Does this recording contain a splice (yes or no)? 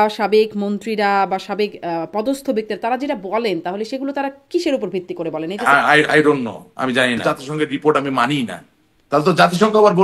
yes